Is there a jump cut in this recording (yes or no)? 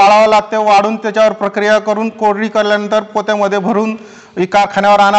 no